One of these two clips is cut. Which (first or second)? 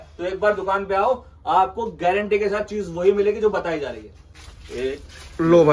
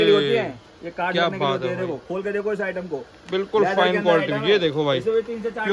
first